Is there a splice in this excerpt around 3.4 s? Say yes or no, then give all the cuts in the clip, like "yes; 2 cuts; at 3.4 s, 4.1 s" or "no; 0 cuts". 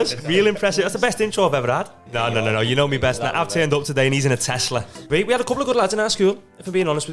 no; 2 cuts; at 2.0 s, 5.0 s